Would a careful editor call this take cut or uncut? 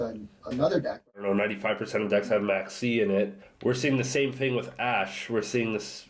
cut